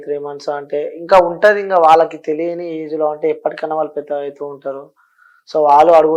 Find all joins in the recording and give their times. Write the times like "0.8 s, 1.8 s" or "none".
none